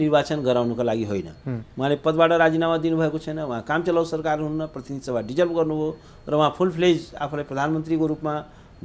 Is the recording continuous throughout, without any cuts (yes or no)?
yes